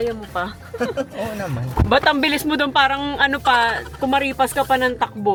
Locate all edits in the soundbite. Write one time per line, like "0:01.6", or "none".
none